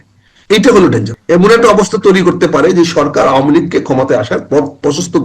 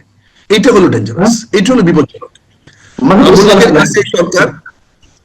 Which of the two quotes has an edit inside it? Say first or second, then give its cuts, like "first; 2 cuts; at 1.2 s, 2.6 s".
first; 1 cut; at 1.5 s